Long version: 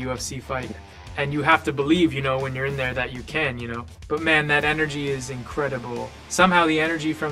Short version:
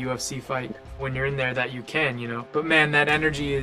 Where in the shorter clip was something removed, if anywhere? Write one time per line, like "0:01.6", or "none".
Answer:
0:01.1
0:02.4